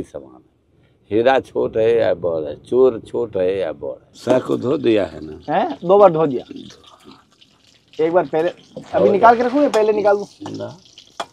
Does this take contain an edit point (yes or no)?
no